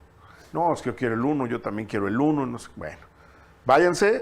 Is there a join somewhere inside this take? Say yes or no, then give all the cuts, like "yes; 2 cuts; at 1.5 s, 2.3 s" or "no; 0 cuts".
no; 0 cuts